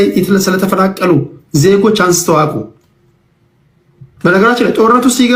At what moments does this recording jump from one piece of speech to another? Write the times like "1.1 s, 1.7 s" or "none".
none